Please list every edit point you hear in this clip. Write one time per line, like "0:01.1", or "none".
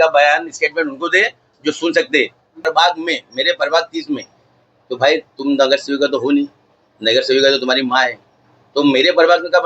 0:02.6